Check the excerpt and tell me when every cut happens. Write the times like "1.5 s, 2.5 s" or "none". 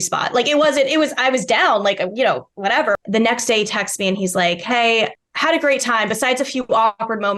3.0 s, 5.3 s